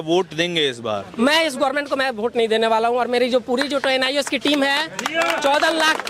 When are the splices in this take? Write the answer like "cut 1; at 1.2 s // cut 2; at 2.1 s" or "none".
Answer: none